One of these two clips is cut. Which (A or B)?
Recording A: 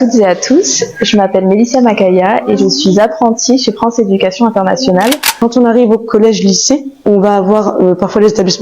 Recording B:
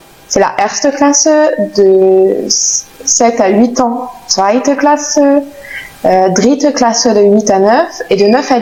A